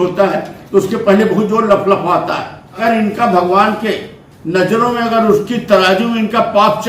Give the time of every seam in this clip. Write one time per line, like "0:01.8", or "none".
0:02.8